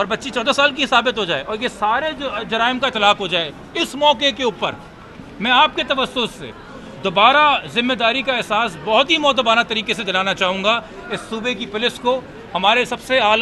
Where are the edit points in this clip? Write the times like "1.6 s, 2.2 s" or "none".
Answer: none